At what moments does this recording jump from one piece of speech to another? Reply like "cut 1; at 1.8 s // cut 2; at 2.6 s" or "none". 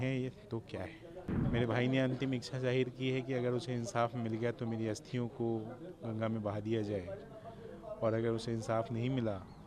cut 1; at 1.4 s